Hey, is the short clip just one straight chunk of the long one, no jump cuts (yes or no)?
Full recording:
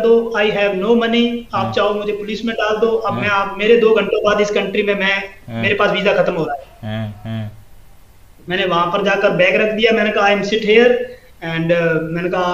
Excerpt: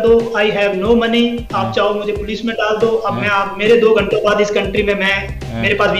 yes